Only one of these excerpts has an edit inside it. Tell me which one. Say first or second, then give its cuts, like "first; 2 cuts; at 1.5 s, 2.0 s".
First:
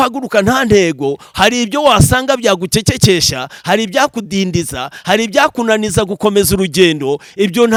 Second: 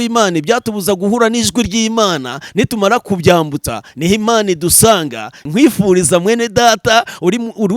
second; 1 cut; at 5.4 s